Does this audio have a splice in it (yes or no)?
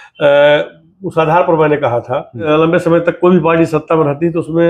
yes